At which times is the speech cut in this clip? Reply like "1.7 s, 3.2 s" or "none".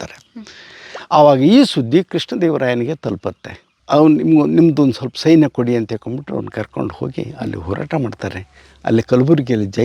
3.7 s